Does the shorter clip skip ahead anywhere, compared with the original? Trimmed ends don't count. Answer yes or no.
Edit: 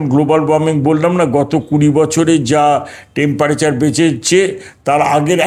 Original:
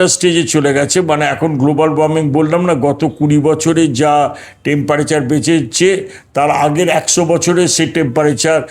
no